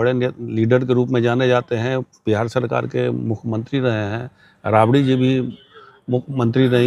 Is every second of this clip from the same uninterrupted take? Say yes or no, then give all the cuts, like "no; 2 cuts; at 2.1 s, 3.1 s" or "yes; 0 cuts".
yes; 0 cuts